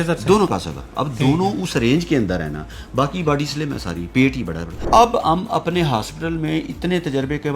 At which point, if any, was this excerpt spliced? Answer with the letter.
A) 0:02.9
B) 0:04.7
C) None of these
B